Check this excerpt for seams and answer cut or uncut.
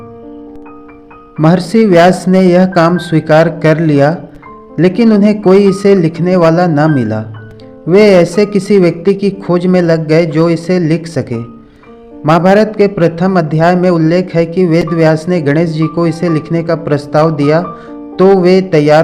uncut